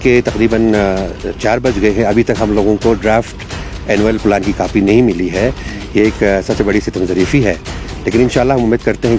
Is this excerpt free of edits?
yes; 0 cuts

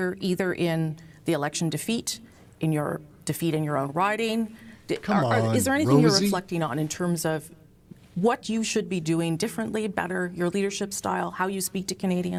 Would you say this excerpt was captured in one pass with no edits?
yes; 0 cuts

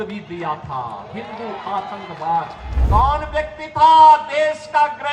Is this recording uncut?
no; 1 cut; at 2.7 s

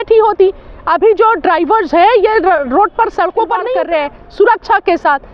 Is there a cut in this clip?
yes; 1 cut; at 3.7 s

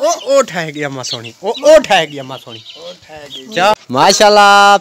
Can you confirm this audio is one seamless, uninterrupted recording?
no; 1 cut; at 3.7 s

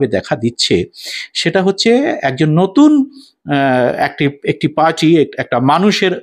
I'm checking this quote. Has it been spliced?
no; 0 cuts

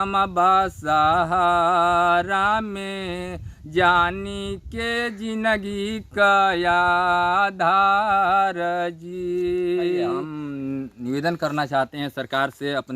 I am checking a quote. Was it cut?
yes; 1 cut; at 10.3 s

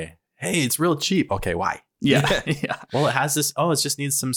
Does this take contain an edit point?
yes; 1 cut; at 2.8 s

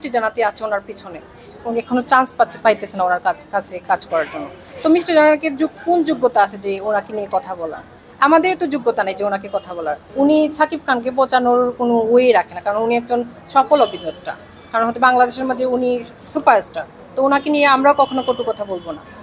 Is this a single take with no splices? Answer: yes; 0 cuts

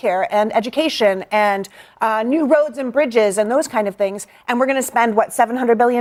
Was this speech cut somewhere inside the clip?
no; 0 cuts

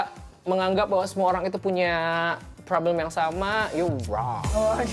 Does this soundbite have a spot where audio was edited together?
no; 0 cuts

